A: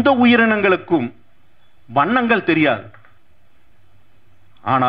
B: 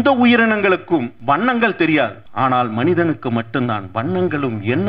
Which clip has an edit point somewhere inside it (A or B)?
B